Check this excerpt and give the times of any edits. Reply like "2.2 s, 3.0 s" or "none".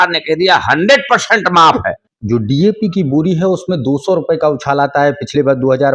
2.1 s